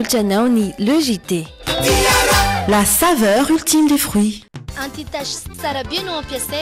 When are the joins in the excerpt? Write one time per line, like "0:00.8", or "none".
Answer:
0:04.4